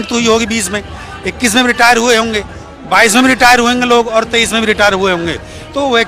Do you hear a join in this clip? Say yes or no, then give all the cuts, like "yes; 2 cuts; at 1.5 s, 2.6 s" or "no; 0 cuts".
no; 0 cuts